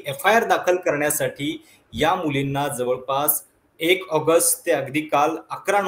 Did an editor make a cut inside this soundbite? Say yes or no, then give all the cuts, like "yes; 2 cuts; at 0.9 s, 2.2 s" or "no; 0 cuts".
no; 0 cuts